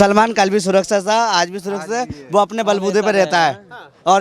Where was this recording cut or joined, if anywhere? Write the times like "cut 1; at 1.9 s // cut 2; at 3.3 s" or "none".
none